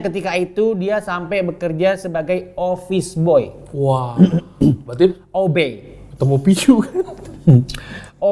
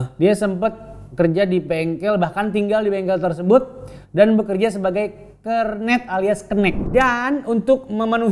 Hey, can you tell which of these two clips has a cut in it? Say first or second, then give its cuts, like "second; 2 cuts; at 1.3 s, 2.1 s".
second; 1 cut; at 6.8 s